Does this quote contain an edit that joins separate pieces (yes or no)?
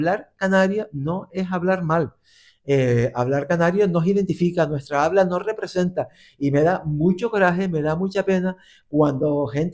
no